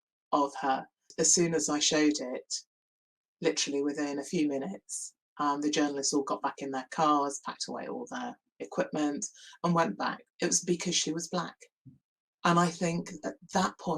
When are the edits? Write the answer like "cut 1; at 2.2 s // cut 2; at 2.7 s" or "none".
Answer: cut 1; at 1.0 s